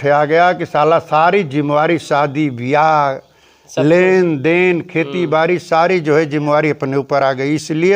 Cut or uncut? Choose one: uncut